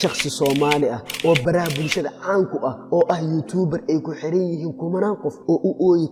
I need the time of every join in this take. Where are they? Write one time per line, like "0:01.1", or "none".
none